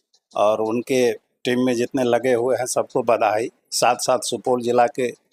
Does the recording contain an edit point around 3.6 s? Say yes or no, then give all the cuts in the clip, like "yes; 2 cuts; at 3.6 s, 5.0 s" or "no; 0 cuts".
no; 0 cuts